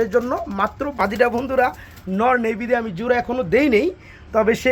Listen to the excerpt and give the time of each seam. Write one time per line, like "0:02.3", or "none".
0:01.0